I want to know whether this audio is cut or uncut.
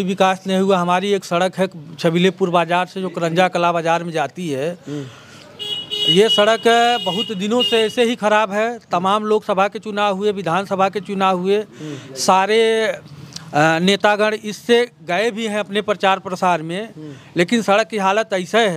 uncut